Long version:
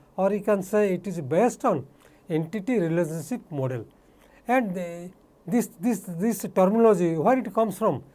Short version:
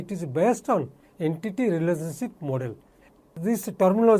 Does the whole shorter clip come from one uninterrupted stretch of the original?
no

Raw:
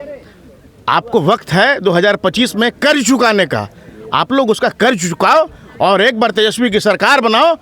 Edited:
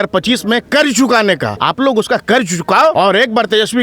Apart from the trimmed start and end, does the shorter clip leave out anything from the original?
yes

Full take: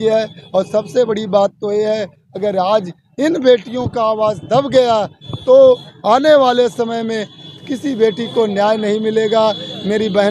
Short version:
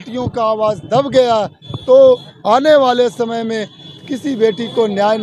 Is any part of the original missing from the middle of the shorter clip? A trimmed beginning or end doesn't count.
no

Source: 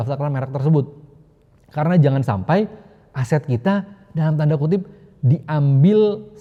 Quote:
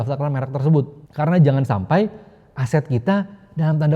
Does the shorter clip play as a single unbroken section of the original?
no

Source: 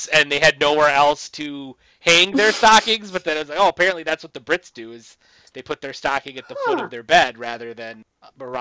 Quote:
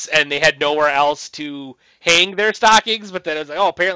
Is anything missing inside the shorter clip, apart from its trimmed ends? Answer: no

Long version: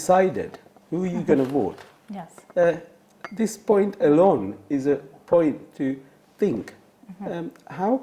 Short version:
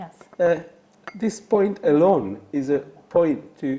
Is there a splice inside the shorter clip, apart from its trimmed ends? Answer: no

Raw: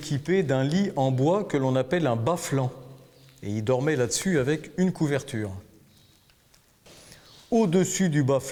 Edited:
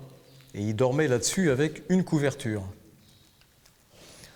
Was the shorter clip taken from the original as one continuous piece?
yes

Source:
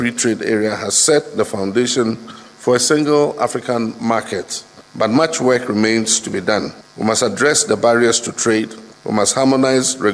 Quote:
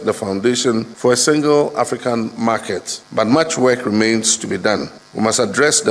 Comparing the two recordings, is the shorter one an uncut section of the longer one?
no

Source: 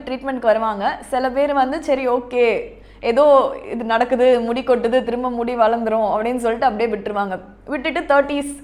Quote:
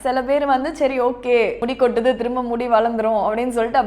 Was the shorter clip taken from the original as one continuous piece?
no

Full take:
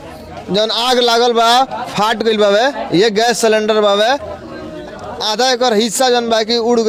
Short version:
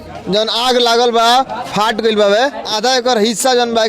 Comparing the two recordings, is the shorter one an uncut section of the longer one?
no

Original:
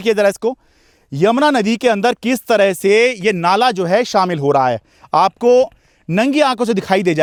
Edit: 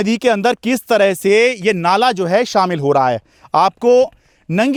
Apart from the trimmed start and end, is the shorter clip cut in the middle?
no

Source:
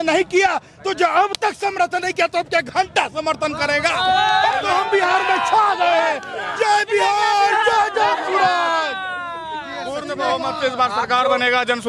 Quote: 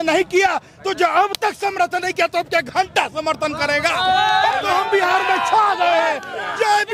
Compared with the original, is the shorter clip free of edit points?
yes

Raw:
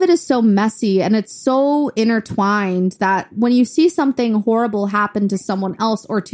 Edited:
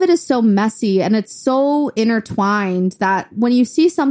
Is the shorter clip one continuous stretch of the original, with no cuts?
yes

